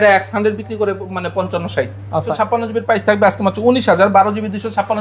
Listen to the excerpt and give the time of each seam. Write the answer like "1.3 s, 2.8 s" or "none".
2.3 s